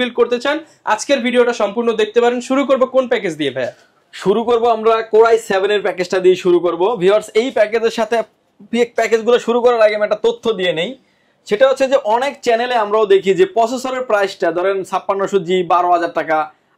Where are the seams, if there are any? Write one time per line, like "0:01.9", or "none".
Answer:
none